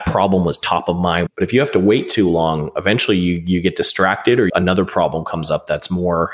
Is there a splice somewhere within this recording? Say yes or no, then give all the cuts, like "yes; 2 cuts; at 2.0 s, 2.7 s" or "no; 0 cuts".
yes; 1 cut; at 1.3 s